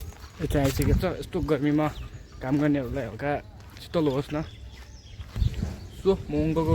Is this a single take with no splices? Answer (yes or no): no